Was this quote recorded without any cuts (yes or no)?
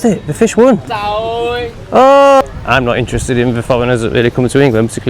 no